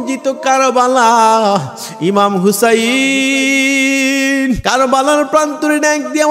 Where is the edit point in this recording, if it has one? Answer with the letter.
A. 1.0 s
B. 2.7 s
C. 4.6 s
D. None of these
C